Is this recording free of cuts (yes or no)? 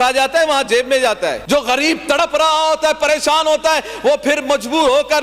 no